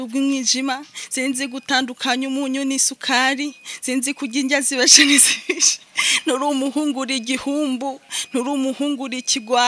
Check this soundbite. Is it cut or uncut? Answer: uncut